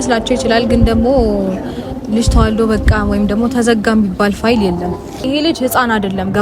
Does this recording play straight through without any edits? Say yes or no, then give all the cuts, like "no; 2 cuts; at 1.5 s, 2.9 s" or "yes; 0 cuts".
no; 1 cut; at 5.2 s